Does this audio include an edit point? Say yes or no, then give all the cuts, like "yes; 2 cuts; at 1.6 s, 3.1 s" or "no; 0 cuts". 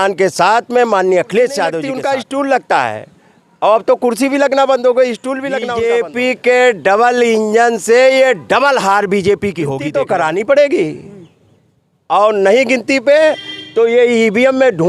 yes; 3 cuts; at 1.9 s, 5.6 s, 9.8 s